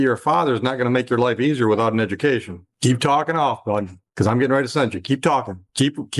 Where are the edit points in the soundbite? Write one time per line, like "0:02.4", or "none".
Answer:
none